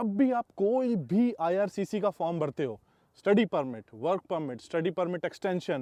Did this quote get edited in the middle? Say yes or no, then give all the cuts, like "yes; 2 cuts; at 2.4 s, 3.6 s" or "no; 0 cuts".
no; 0 cuts